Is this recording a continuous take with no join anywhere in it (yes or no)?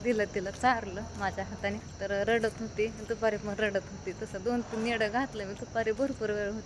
no